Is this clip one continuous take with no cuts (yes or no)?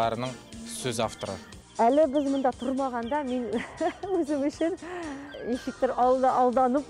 no